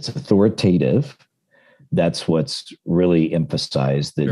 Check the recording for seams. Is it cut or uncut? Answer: cut